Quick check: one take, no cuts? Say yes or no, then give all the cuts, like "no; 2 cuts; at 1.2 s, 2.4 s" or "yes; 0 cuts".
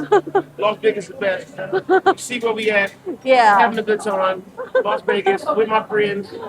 yes; 0 cuts